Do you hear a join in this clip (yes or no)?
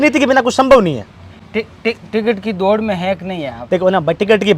no